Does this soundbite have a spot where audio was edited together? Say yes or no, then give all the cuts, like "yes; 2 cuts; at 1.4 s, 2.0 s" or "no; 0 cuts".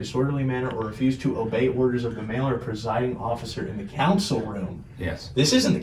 no; 0 cuts